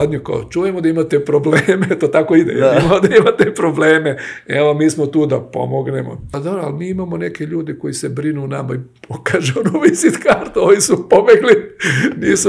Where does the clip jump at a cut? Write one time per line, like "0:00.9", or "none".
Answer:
0:06.3